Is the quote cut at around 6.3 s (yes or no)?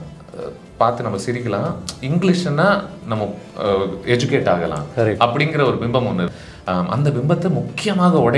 yes